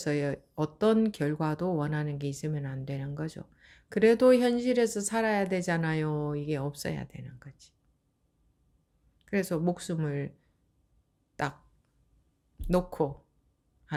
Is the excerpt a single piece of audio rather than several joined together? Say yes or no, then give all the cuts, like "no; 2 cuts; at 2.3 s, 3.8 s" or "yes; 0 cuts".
yes; 0 cuts